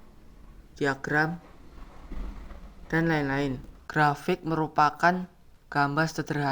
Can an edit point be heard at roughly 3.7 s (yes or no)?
yes